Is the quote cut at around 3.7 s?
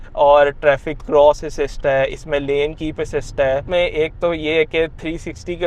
yes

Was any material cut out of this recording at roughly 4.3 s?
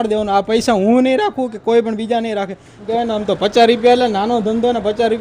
no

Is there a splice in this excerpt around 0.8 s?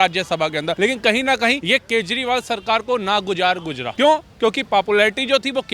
yes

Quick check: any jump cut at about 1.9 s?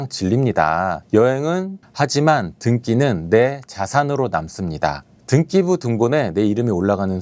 yes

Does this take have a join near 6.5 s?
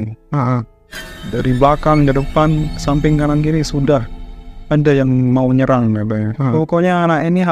yes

